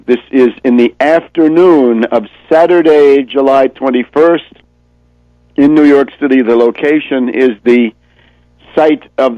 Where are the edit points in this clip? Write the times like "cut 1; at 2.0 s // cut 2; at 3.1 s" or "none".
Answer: none